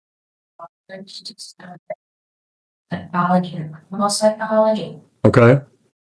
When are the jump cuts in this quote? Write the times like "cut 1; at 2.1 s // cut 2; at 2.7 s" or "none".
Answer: none